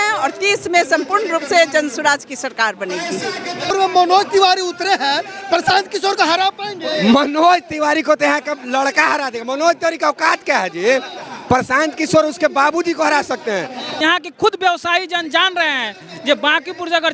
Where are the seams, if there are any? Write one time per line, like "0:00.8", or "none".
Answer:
0:03.7
0:13.9